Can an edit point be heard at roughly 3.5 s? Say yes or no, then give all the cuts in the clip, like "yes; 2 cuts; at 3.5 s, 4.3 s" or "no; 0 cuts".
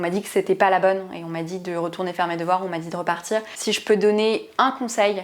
yes; 1 cut; at 3.5 s